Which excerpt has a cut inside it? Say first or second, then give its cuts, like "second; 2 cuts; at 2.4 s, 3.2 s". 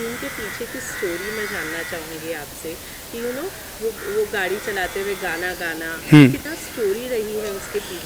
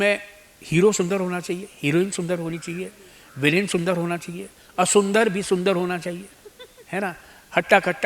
first; 1 cut; at 6.4 s